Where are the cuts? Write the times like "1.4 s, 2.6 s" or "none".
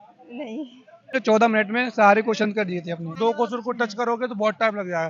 1.2 s, 3.1 s